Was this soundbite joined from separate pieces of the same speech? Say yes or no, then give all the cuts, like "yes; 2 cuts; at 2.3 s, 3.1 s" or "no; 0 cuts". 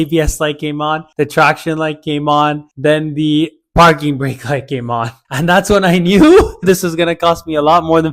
yes; 1 cut; at 6.6 s